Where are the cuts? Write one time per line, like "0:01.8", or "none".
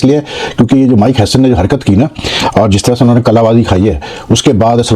none